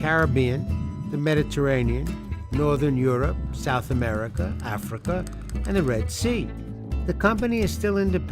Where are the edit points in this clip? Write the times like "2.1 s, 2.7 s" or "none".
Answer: 2.9 s